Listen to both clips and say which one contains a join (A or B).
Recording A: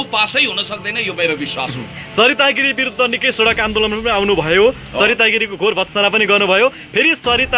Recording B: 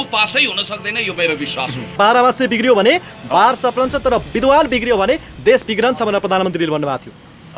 B